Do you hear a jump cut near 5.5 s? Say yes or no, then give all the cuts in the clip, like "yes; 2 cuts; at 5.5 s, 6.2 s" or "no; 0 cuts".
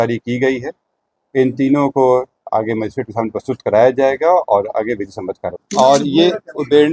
yes; 1 cut; at 5.5 s